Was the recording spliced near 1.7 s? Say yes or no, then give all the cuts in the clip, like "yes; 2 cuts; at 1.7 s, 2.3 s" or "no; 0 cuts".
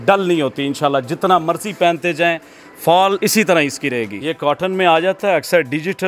no; 2 cuts; at 3.2 s, 4.1 s